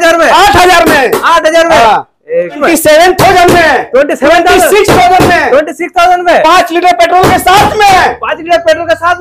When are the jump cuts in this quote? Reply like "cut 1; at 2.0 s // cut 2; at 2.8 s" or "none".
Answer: cut 1; at 2.6 s